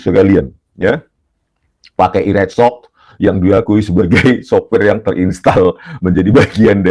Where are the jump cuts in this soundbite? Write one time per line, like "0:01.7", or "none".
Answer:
none